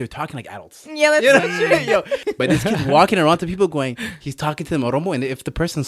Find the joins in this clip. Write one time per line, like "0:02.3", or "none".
0:02.2